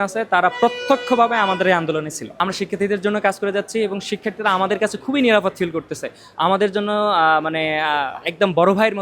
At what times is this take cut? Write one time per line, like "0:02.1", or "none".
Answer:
0:02.2